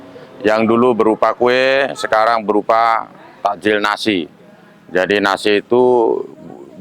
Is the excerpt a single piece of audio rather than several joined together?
yes; 0 cuts

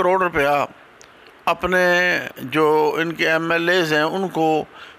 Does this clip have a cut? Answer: no; 0 cuts

